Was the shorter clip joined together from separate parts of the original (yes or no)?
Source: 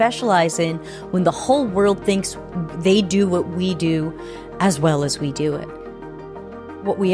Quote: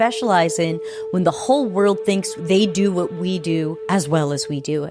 yes